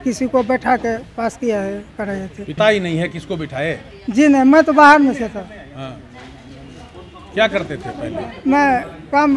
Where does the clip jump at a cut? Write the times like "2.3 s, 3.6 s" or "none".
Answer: 2.6 s